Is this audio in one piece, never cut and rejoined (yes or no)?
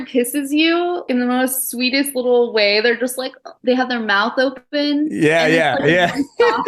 no